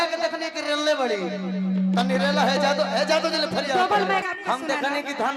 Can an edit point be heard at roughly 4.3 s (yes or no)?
yes